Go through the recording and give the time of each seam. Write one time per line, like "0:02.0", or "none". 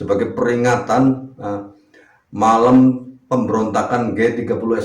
none